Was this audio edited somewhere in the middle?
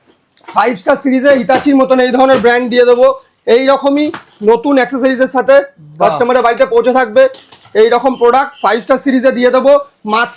no; 0 cuts

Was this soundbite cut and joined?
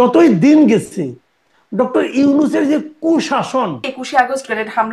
yes; 1 cut; at 3.9 s

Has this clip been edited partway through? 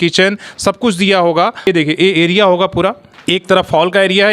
yes; 2 cuts; at 1.6 s, 3.1 s

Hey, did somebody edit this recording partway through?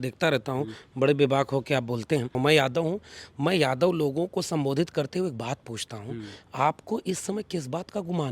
yes; 1 cut; at 2.3 s

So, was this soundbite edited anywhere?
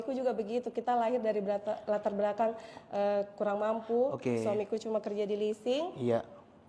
no; 0 cuts

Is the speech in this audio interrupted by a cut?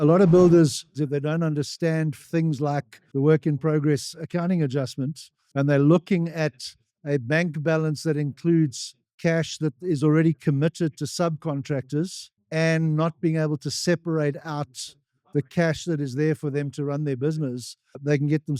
yes; 1 cut; at 0.9 s

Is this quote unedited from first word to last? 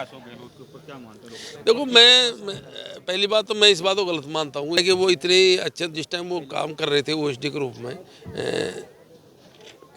no; 1 cut; at 4.8 s

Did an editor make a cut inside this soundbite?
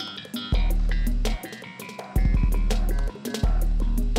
yes; 1 cut; at 3.3 s

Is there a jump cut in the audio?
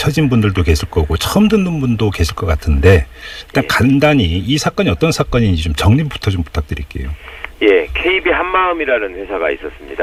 no; 0 cuts

